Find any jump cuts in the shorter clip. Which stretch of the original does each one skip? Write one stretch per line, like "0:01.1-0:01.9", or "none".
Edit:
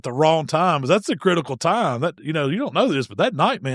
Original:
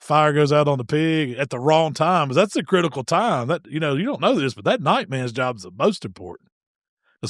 none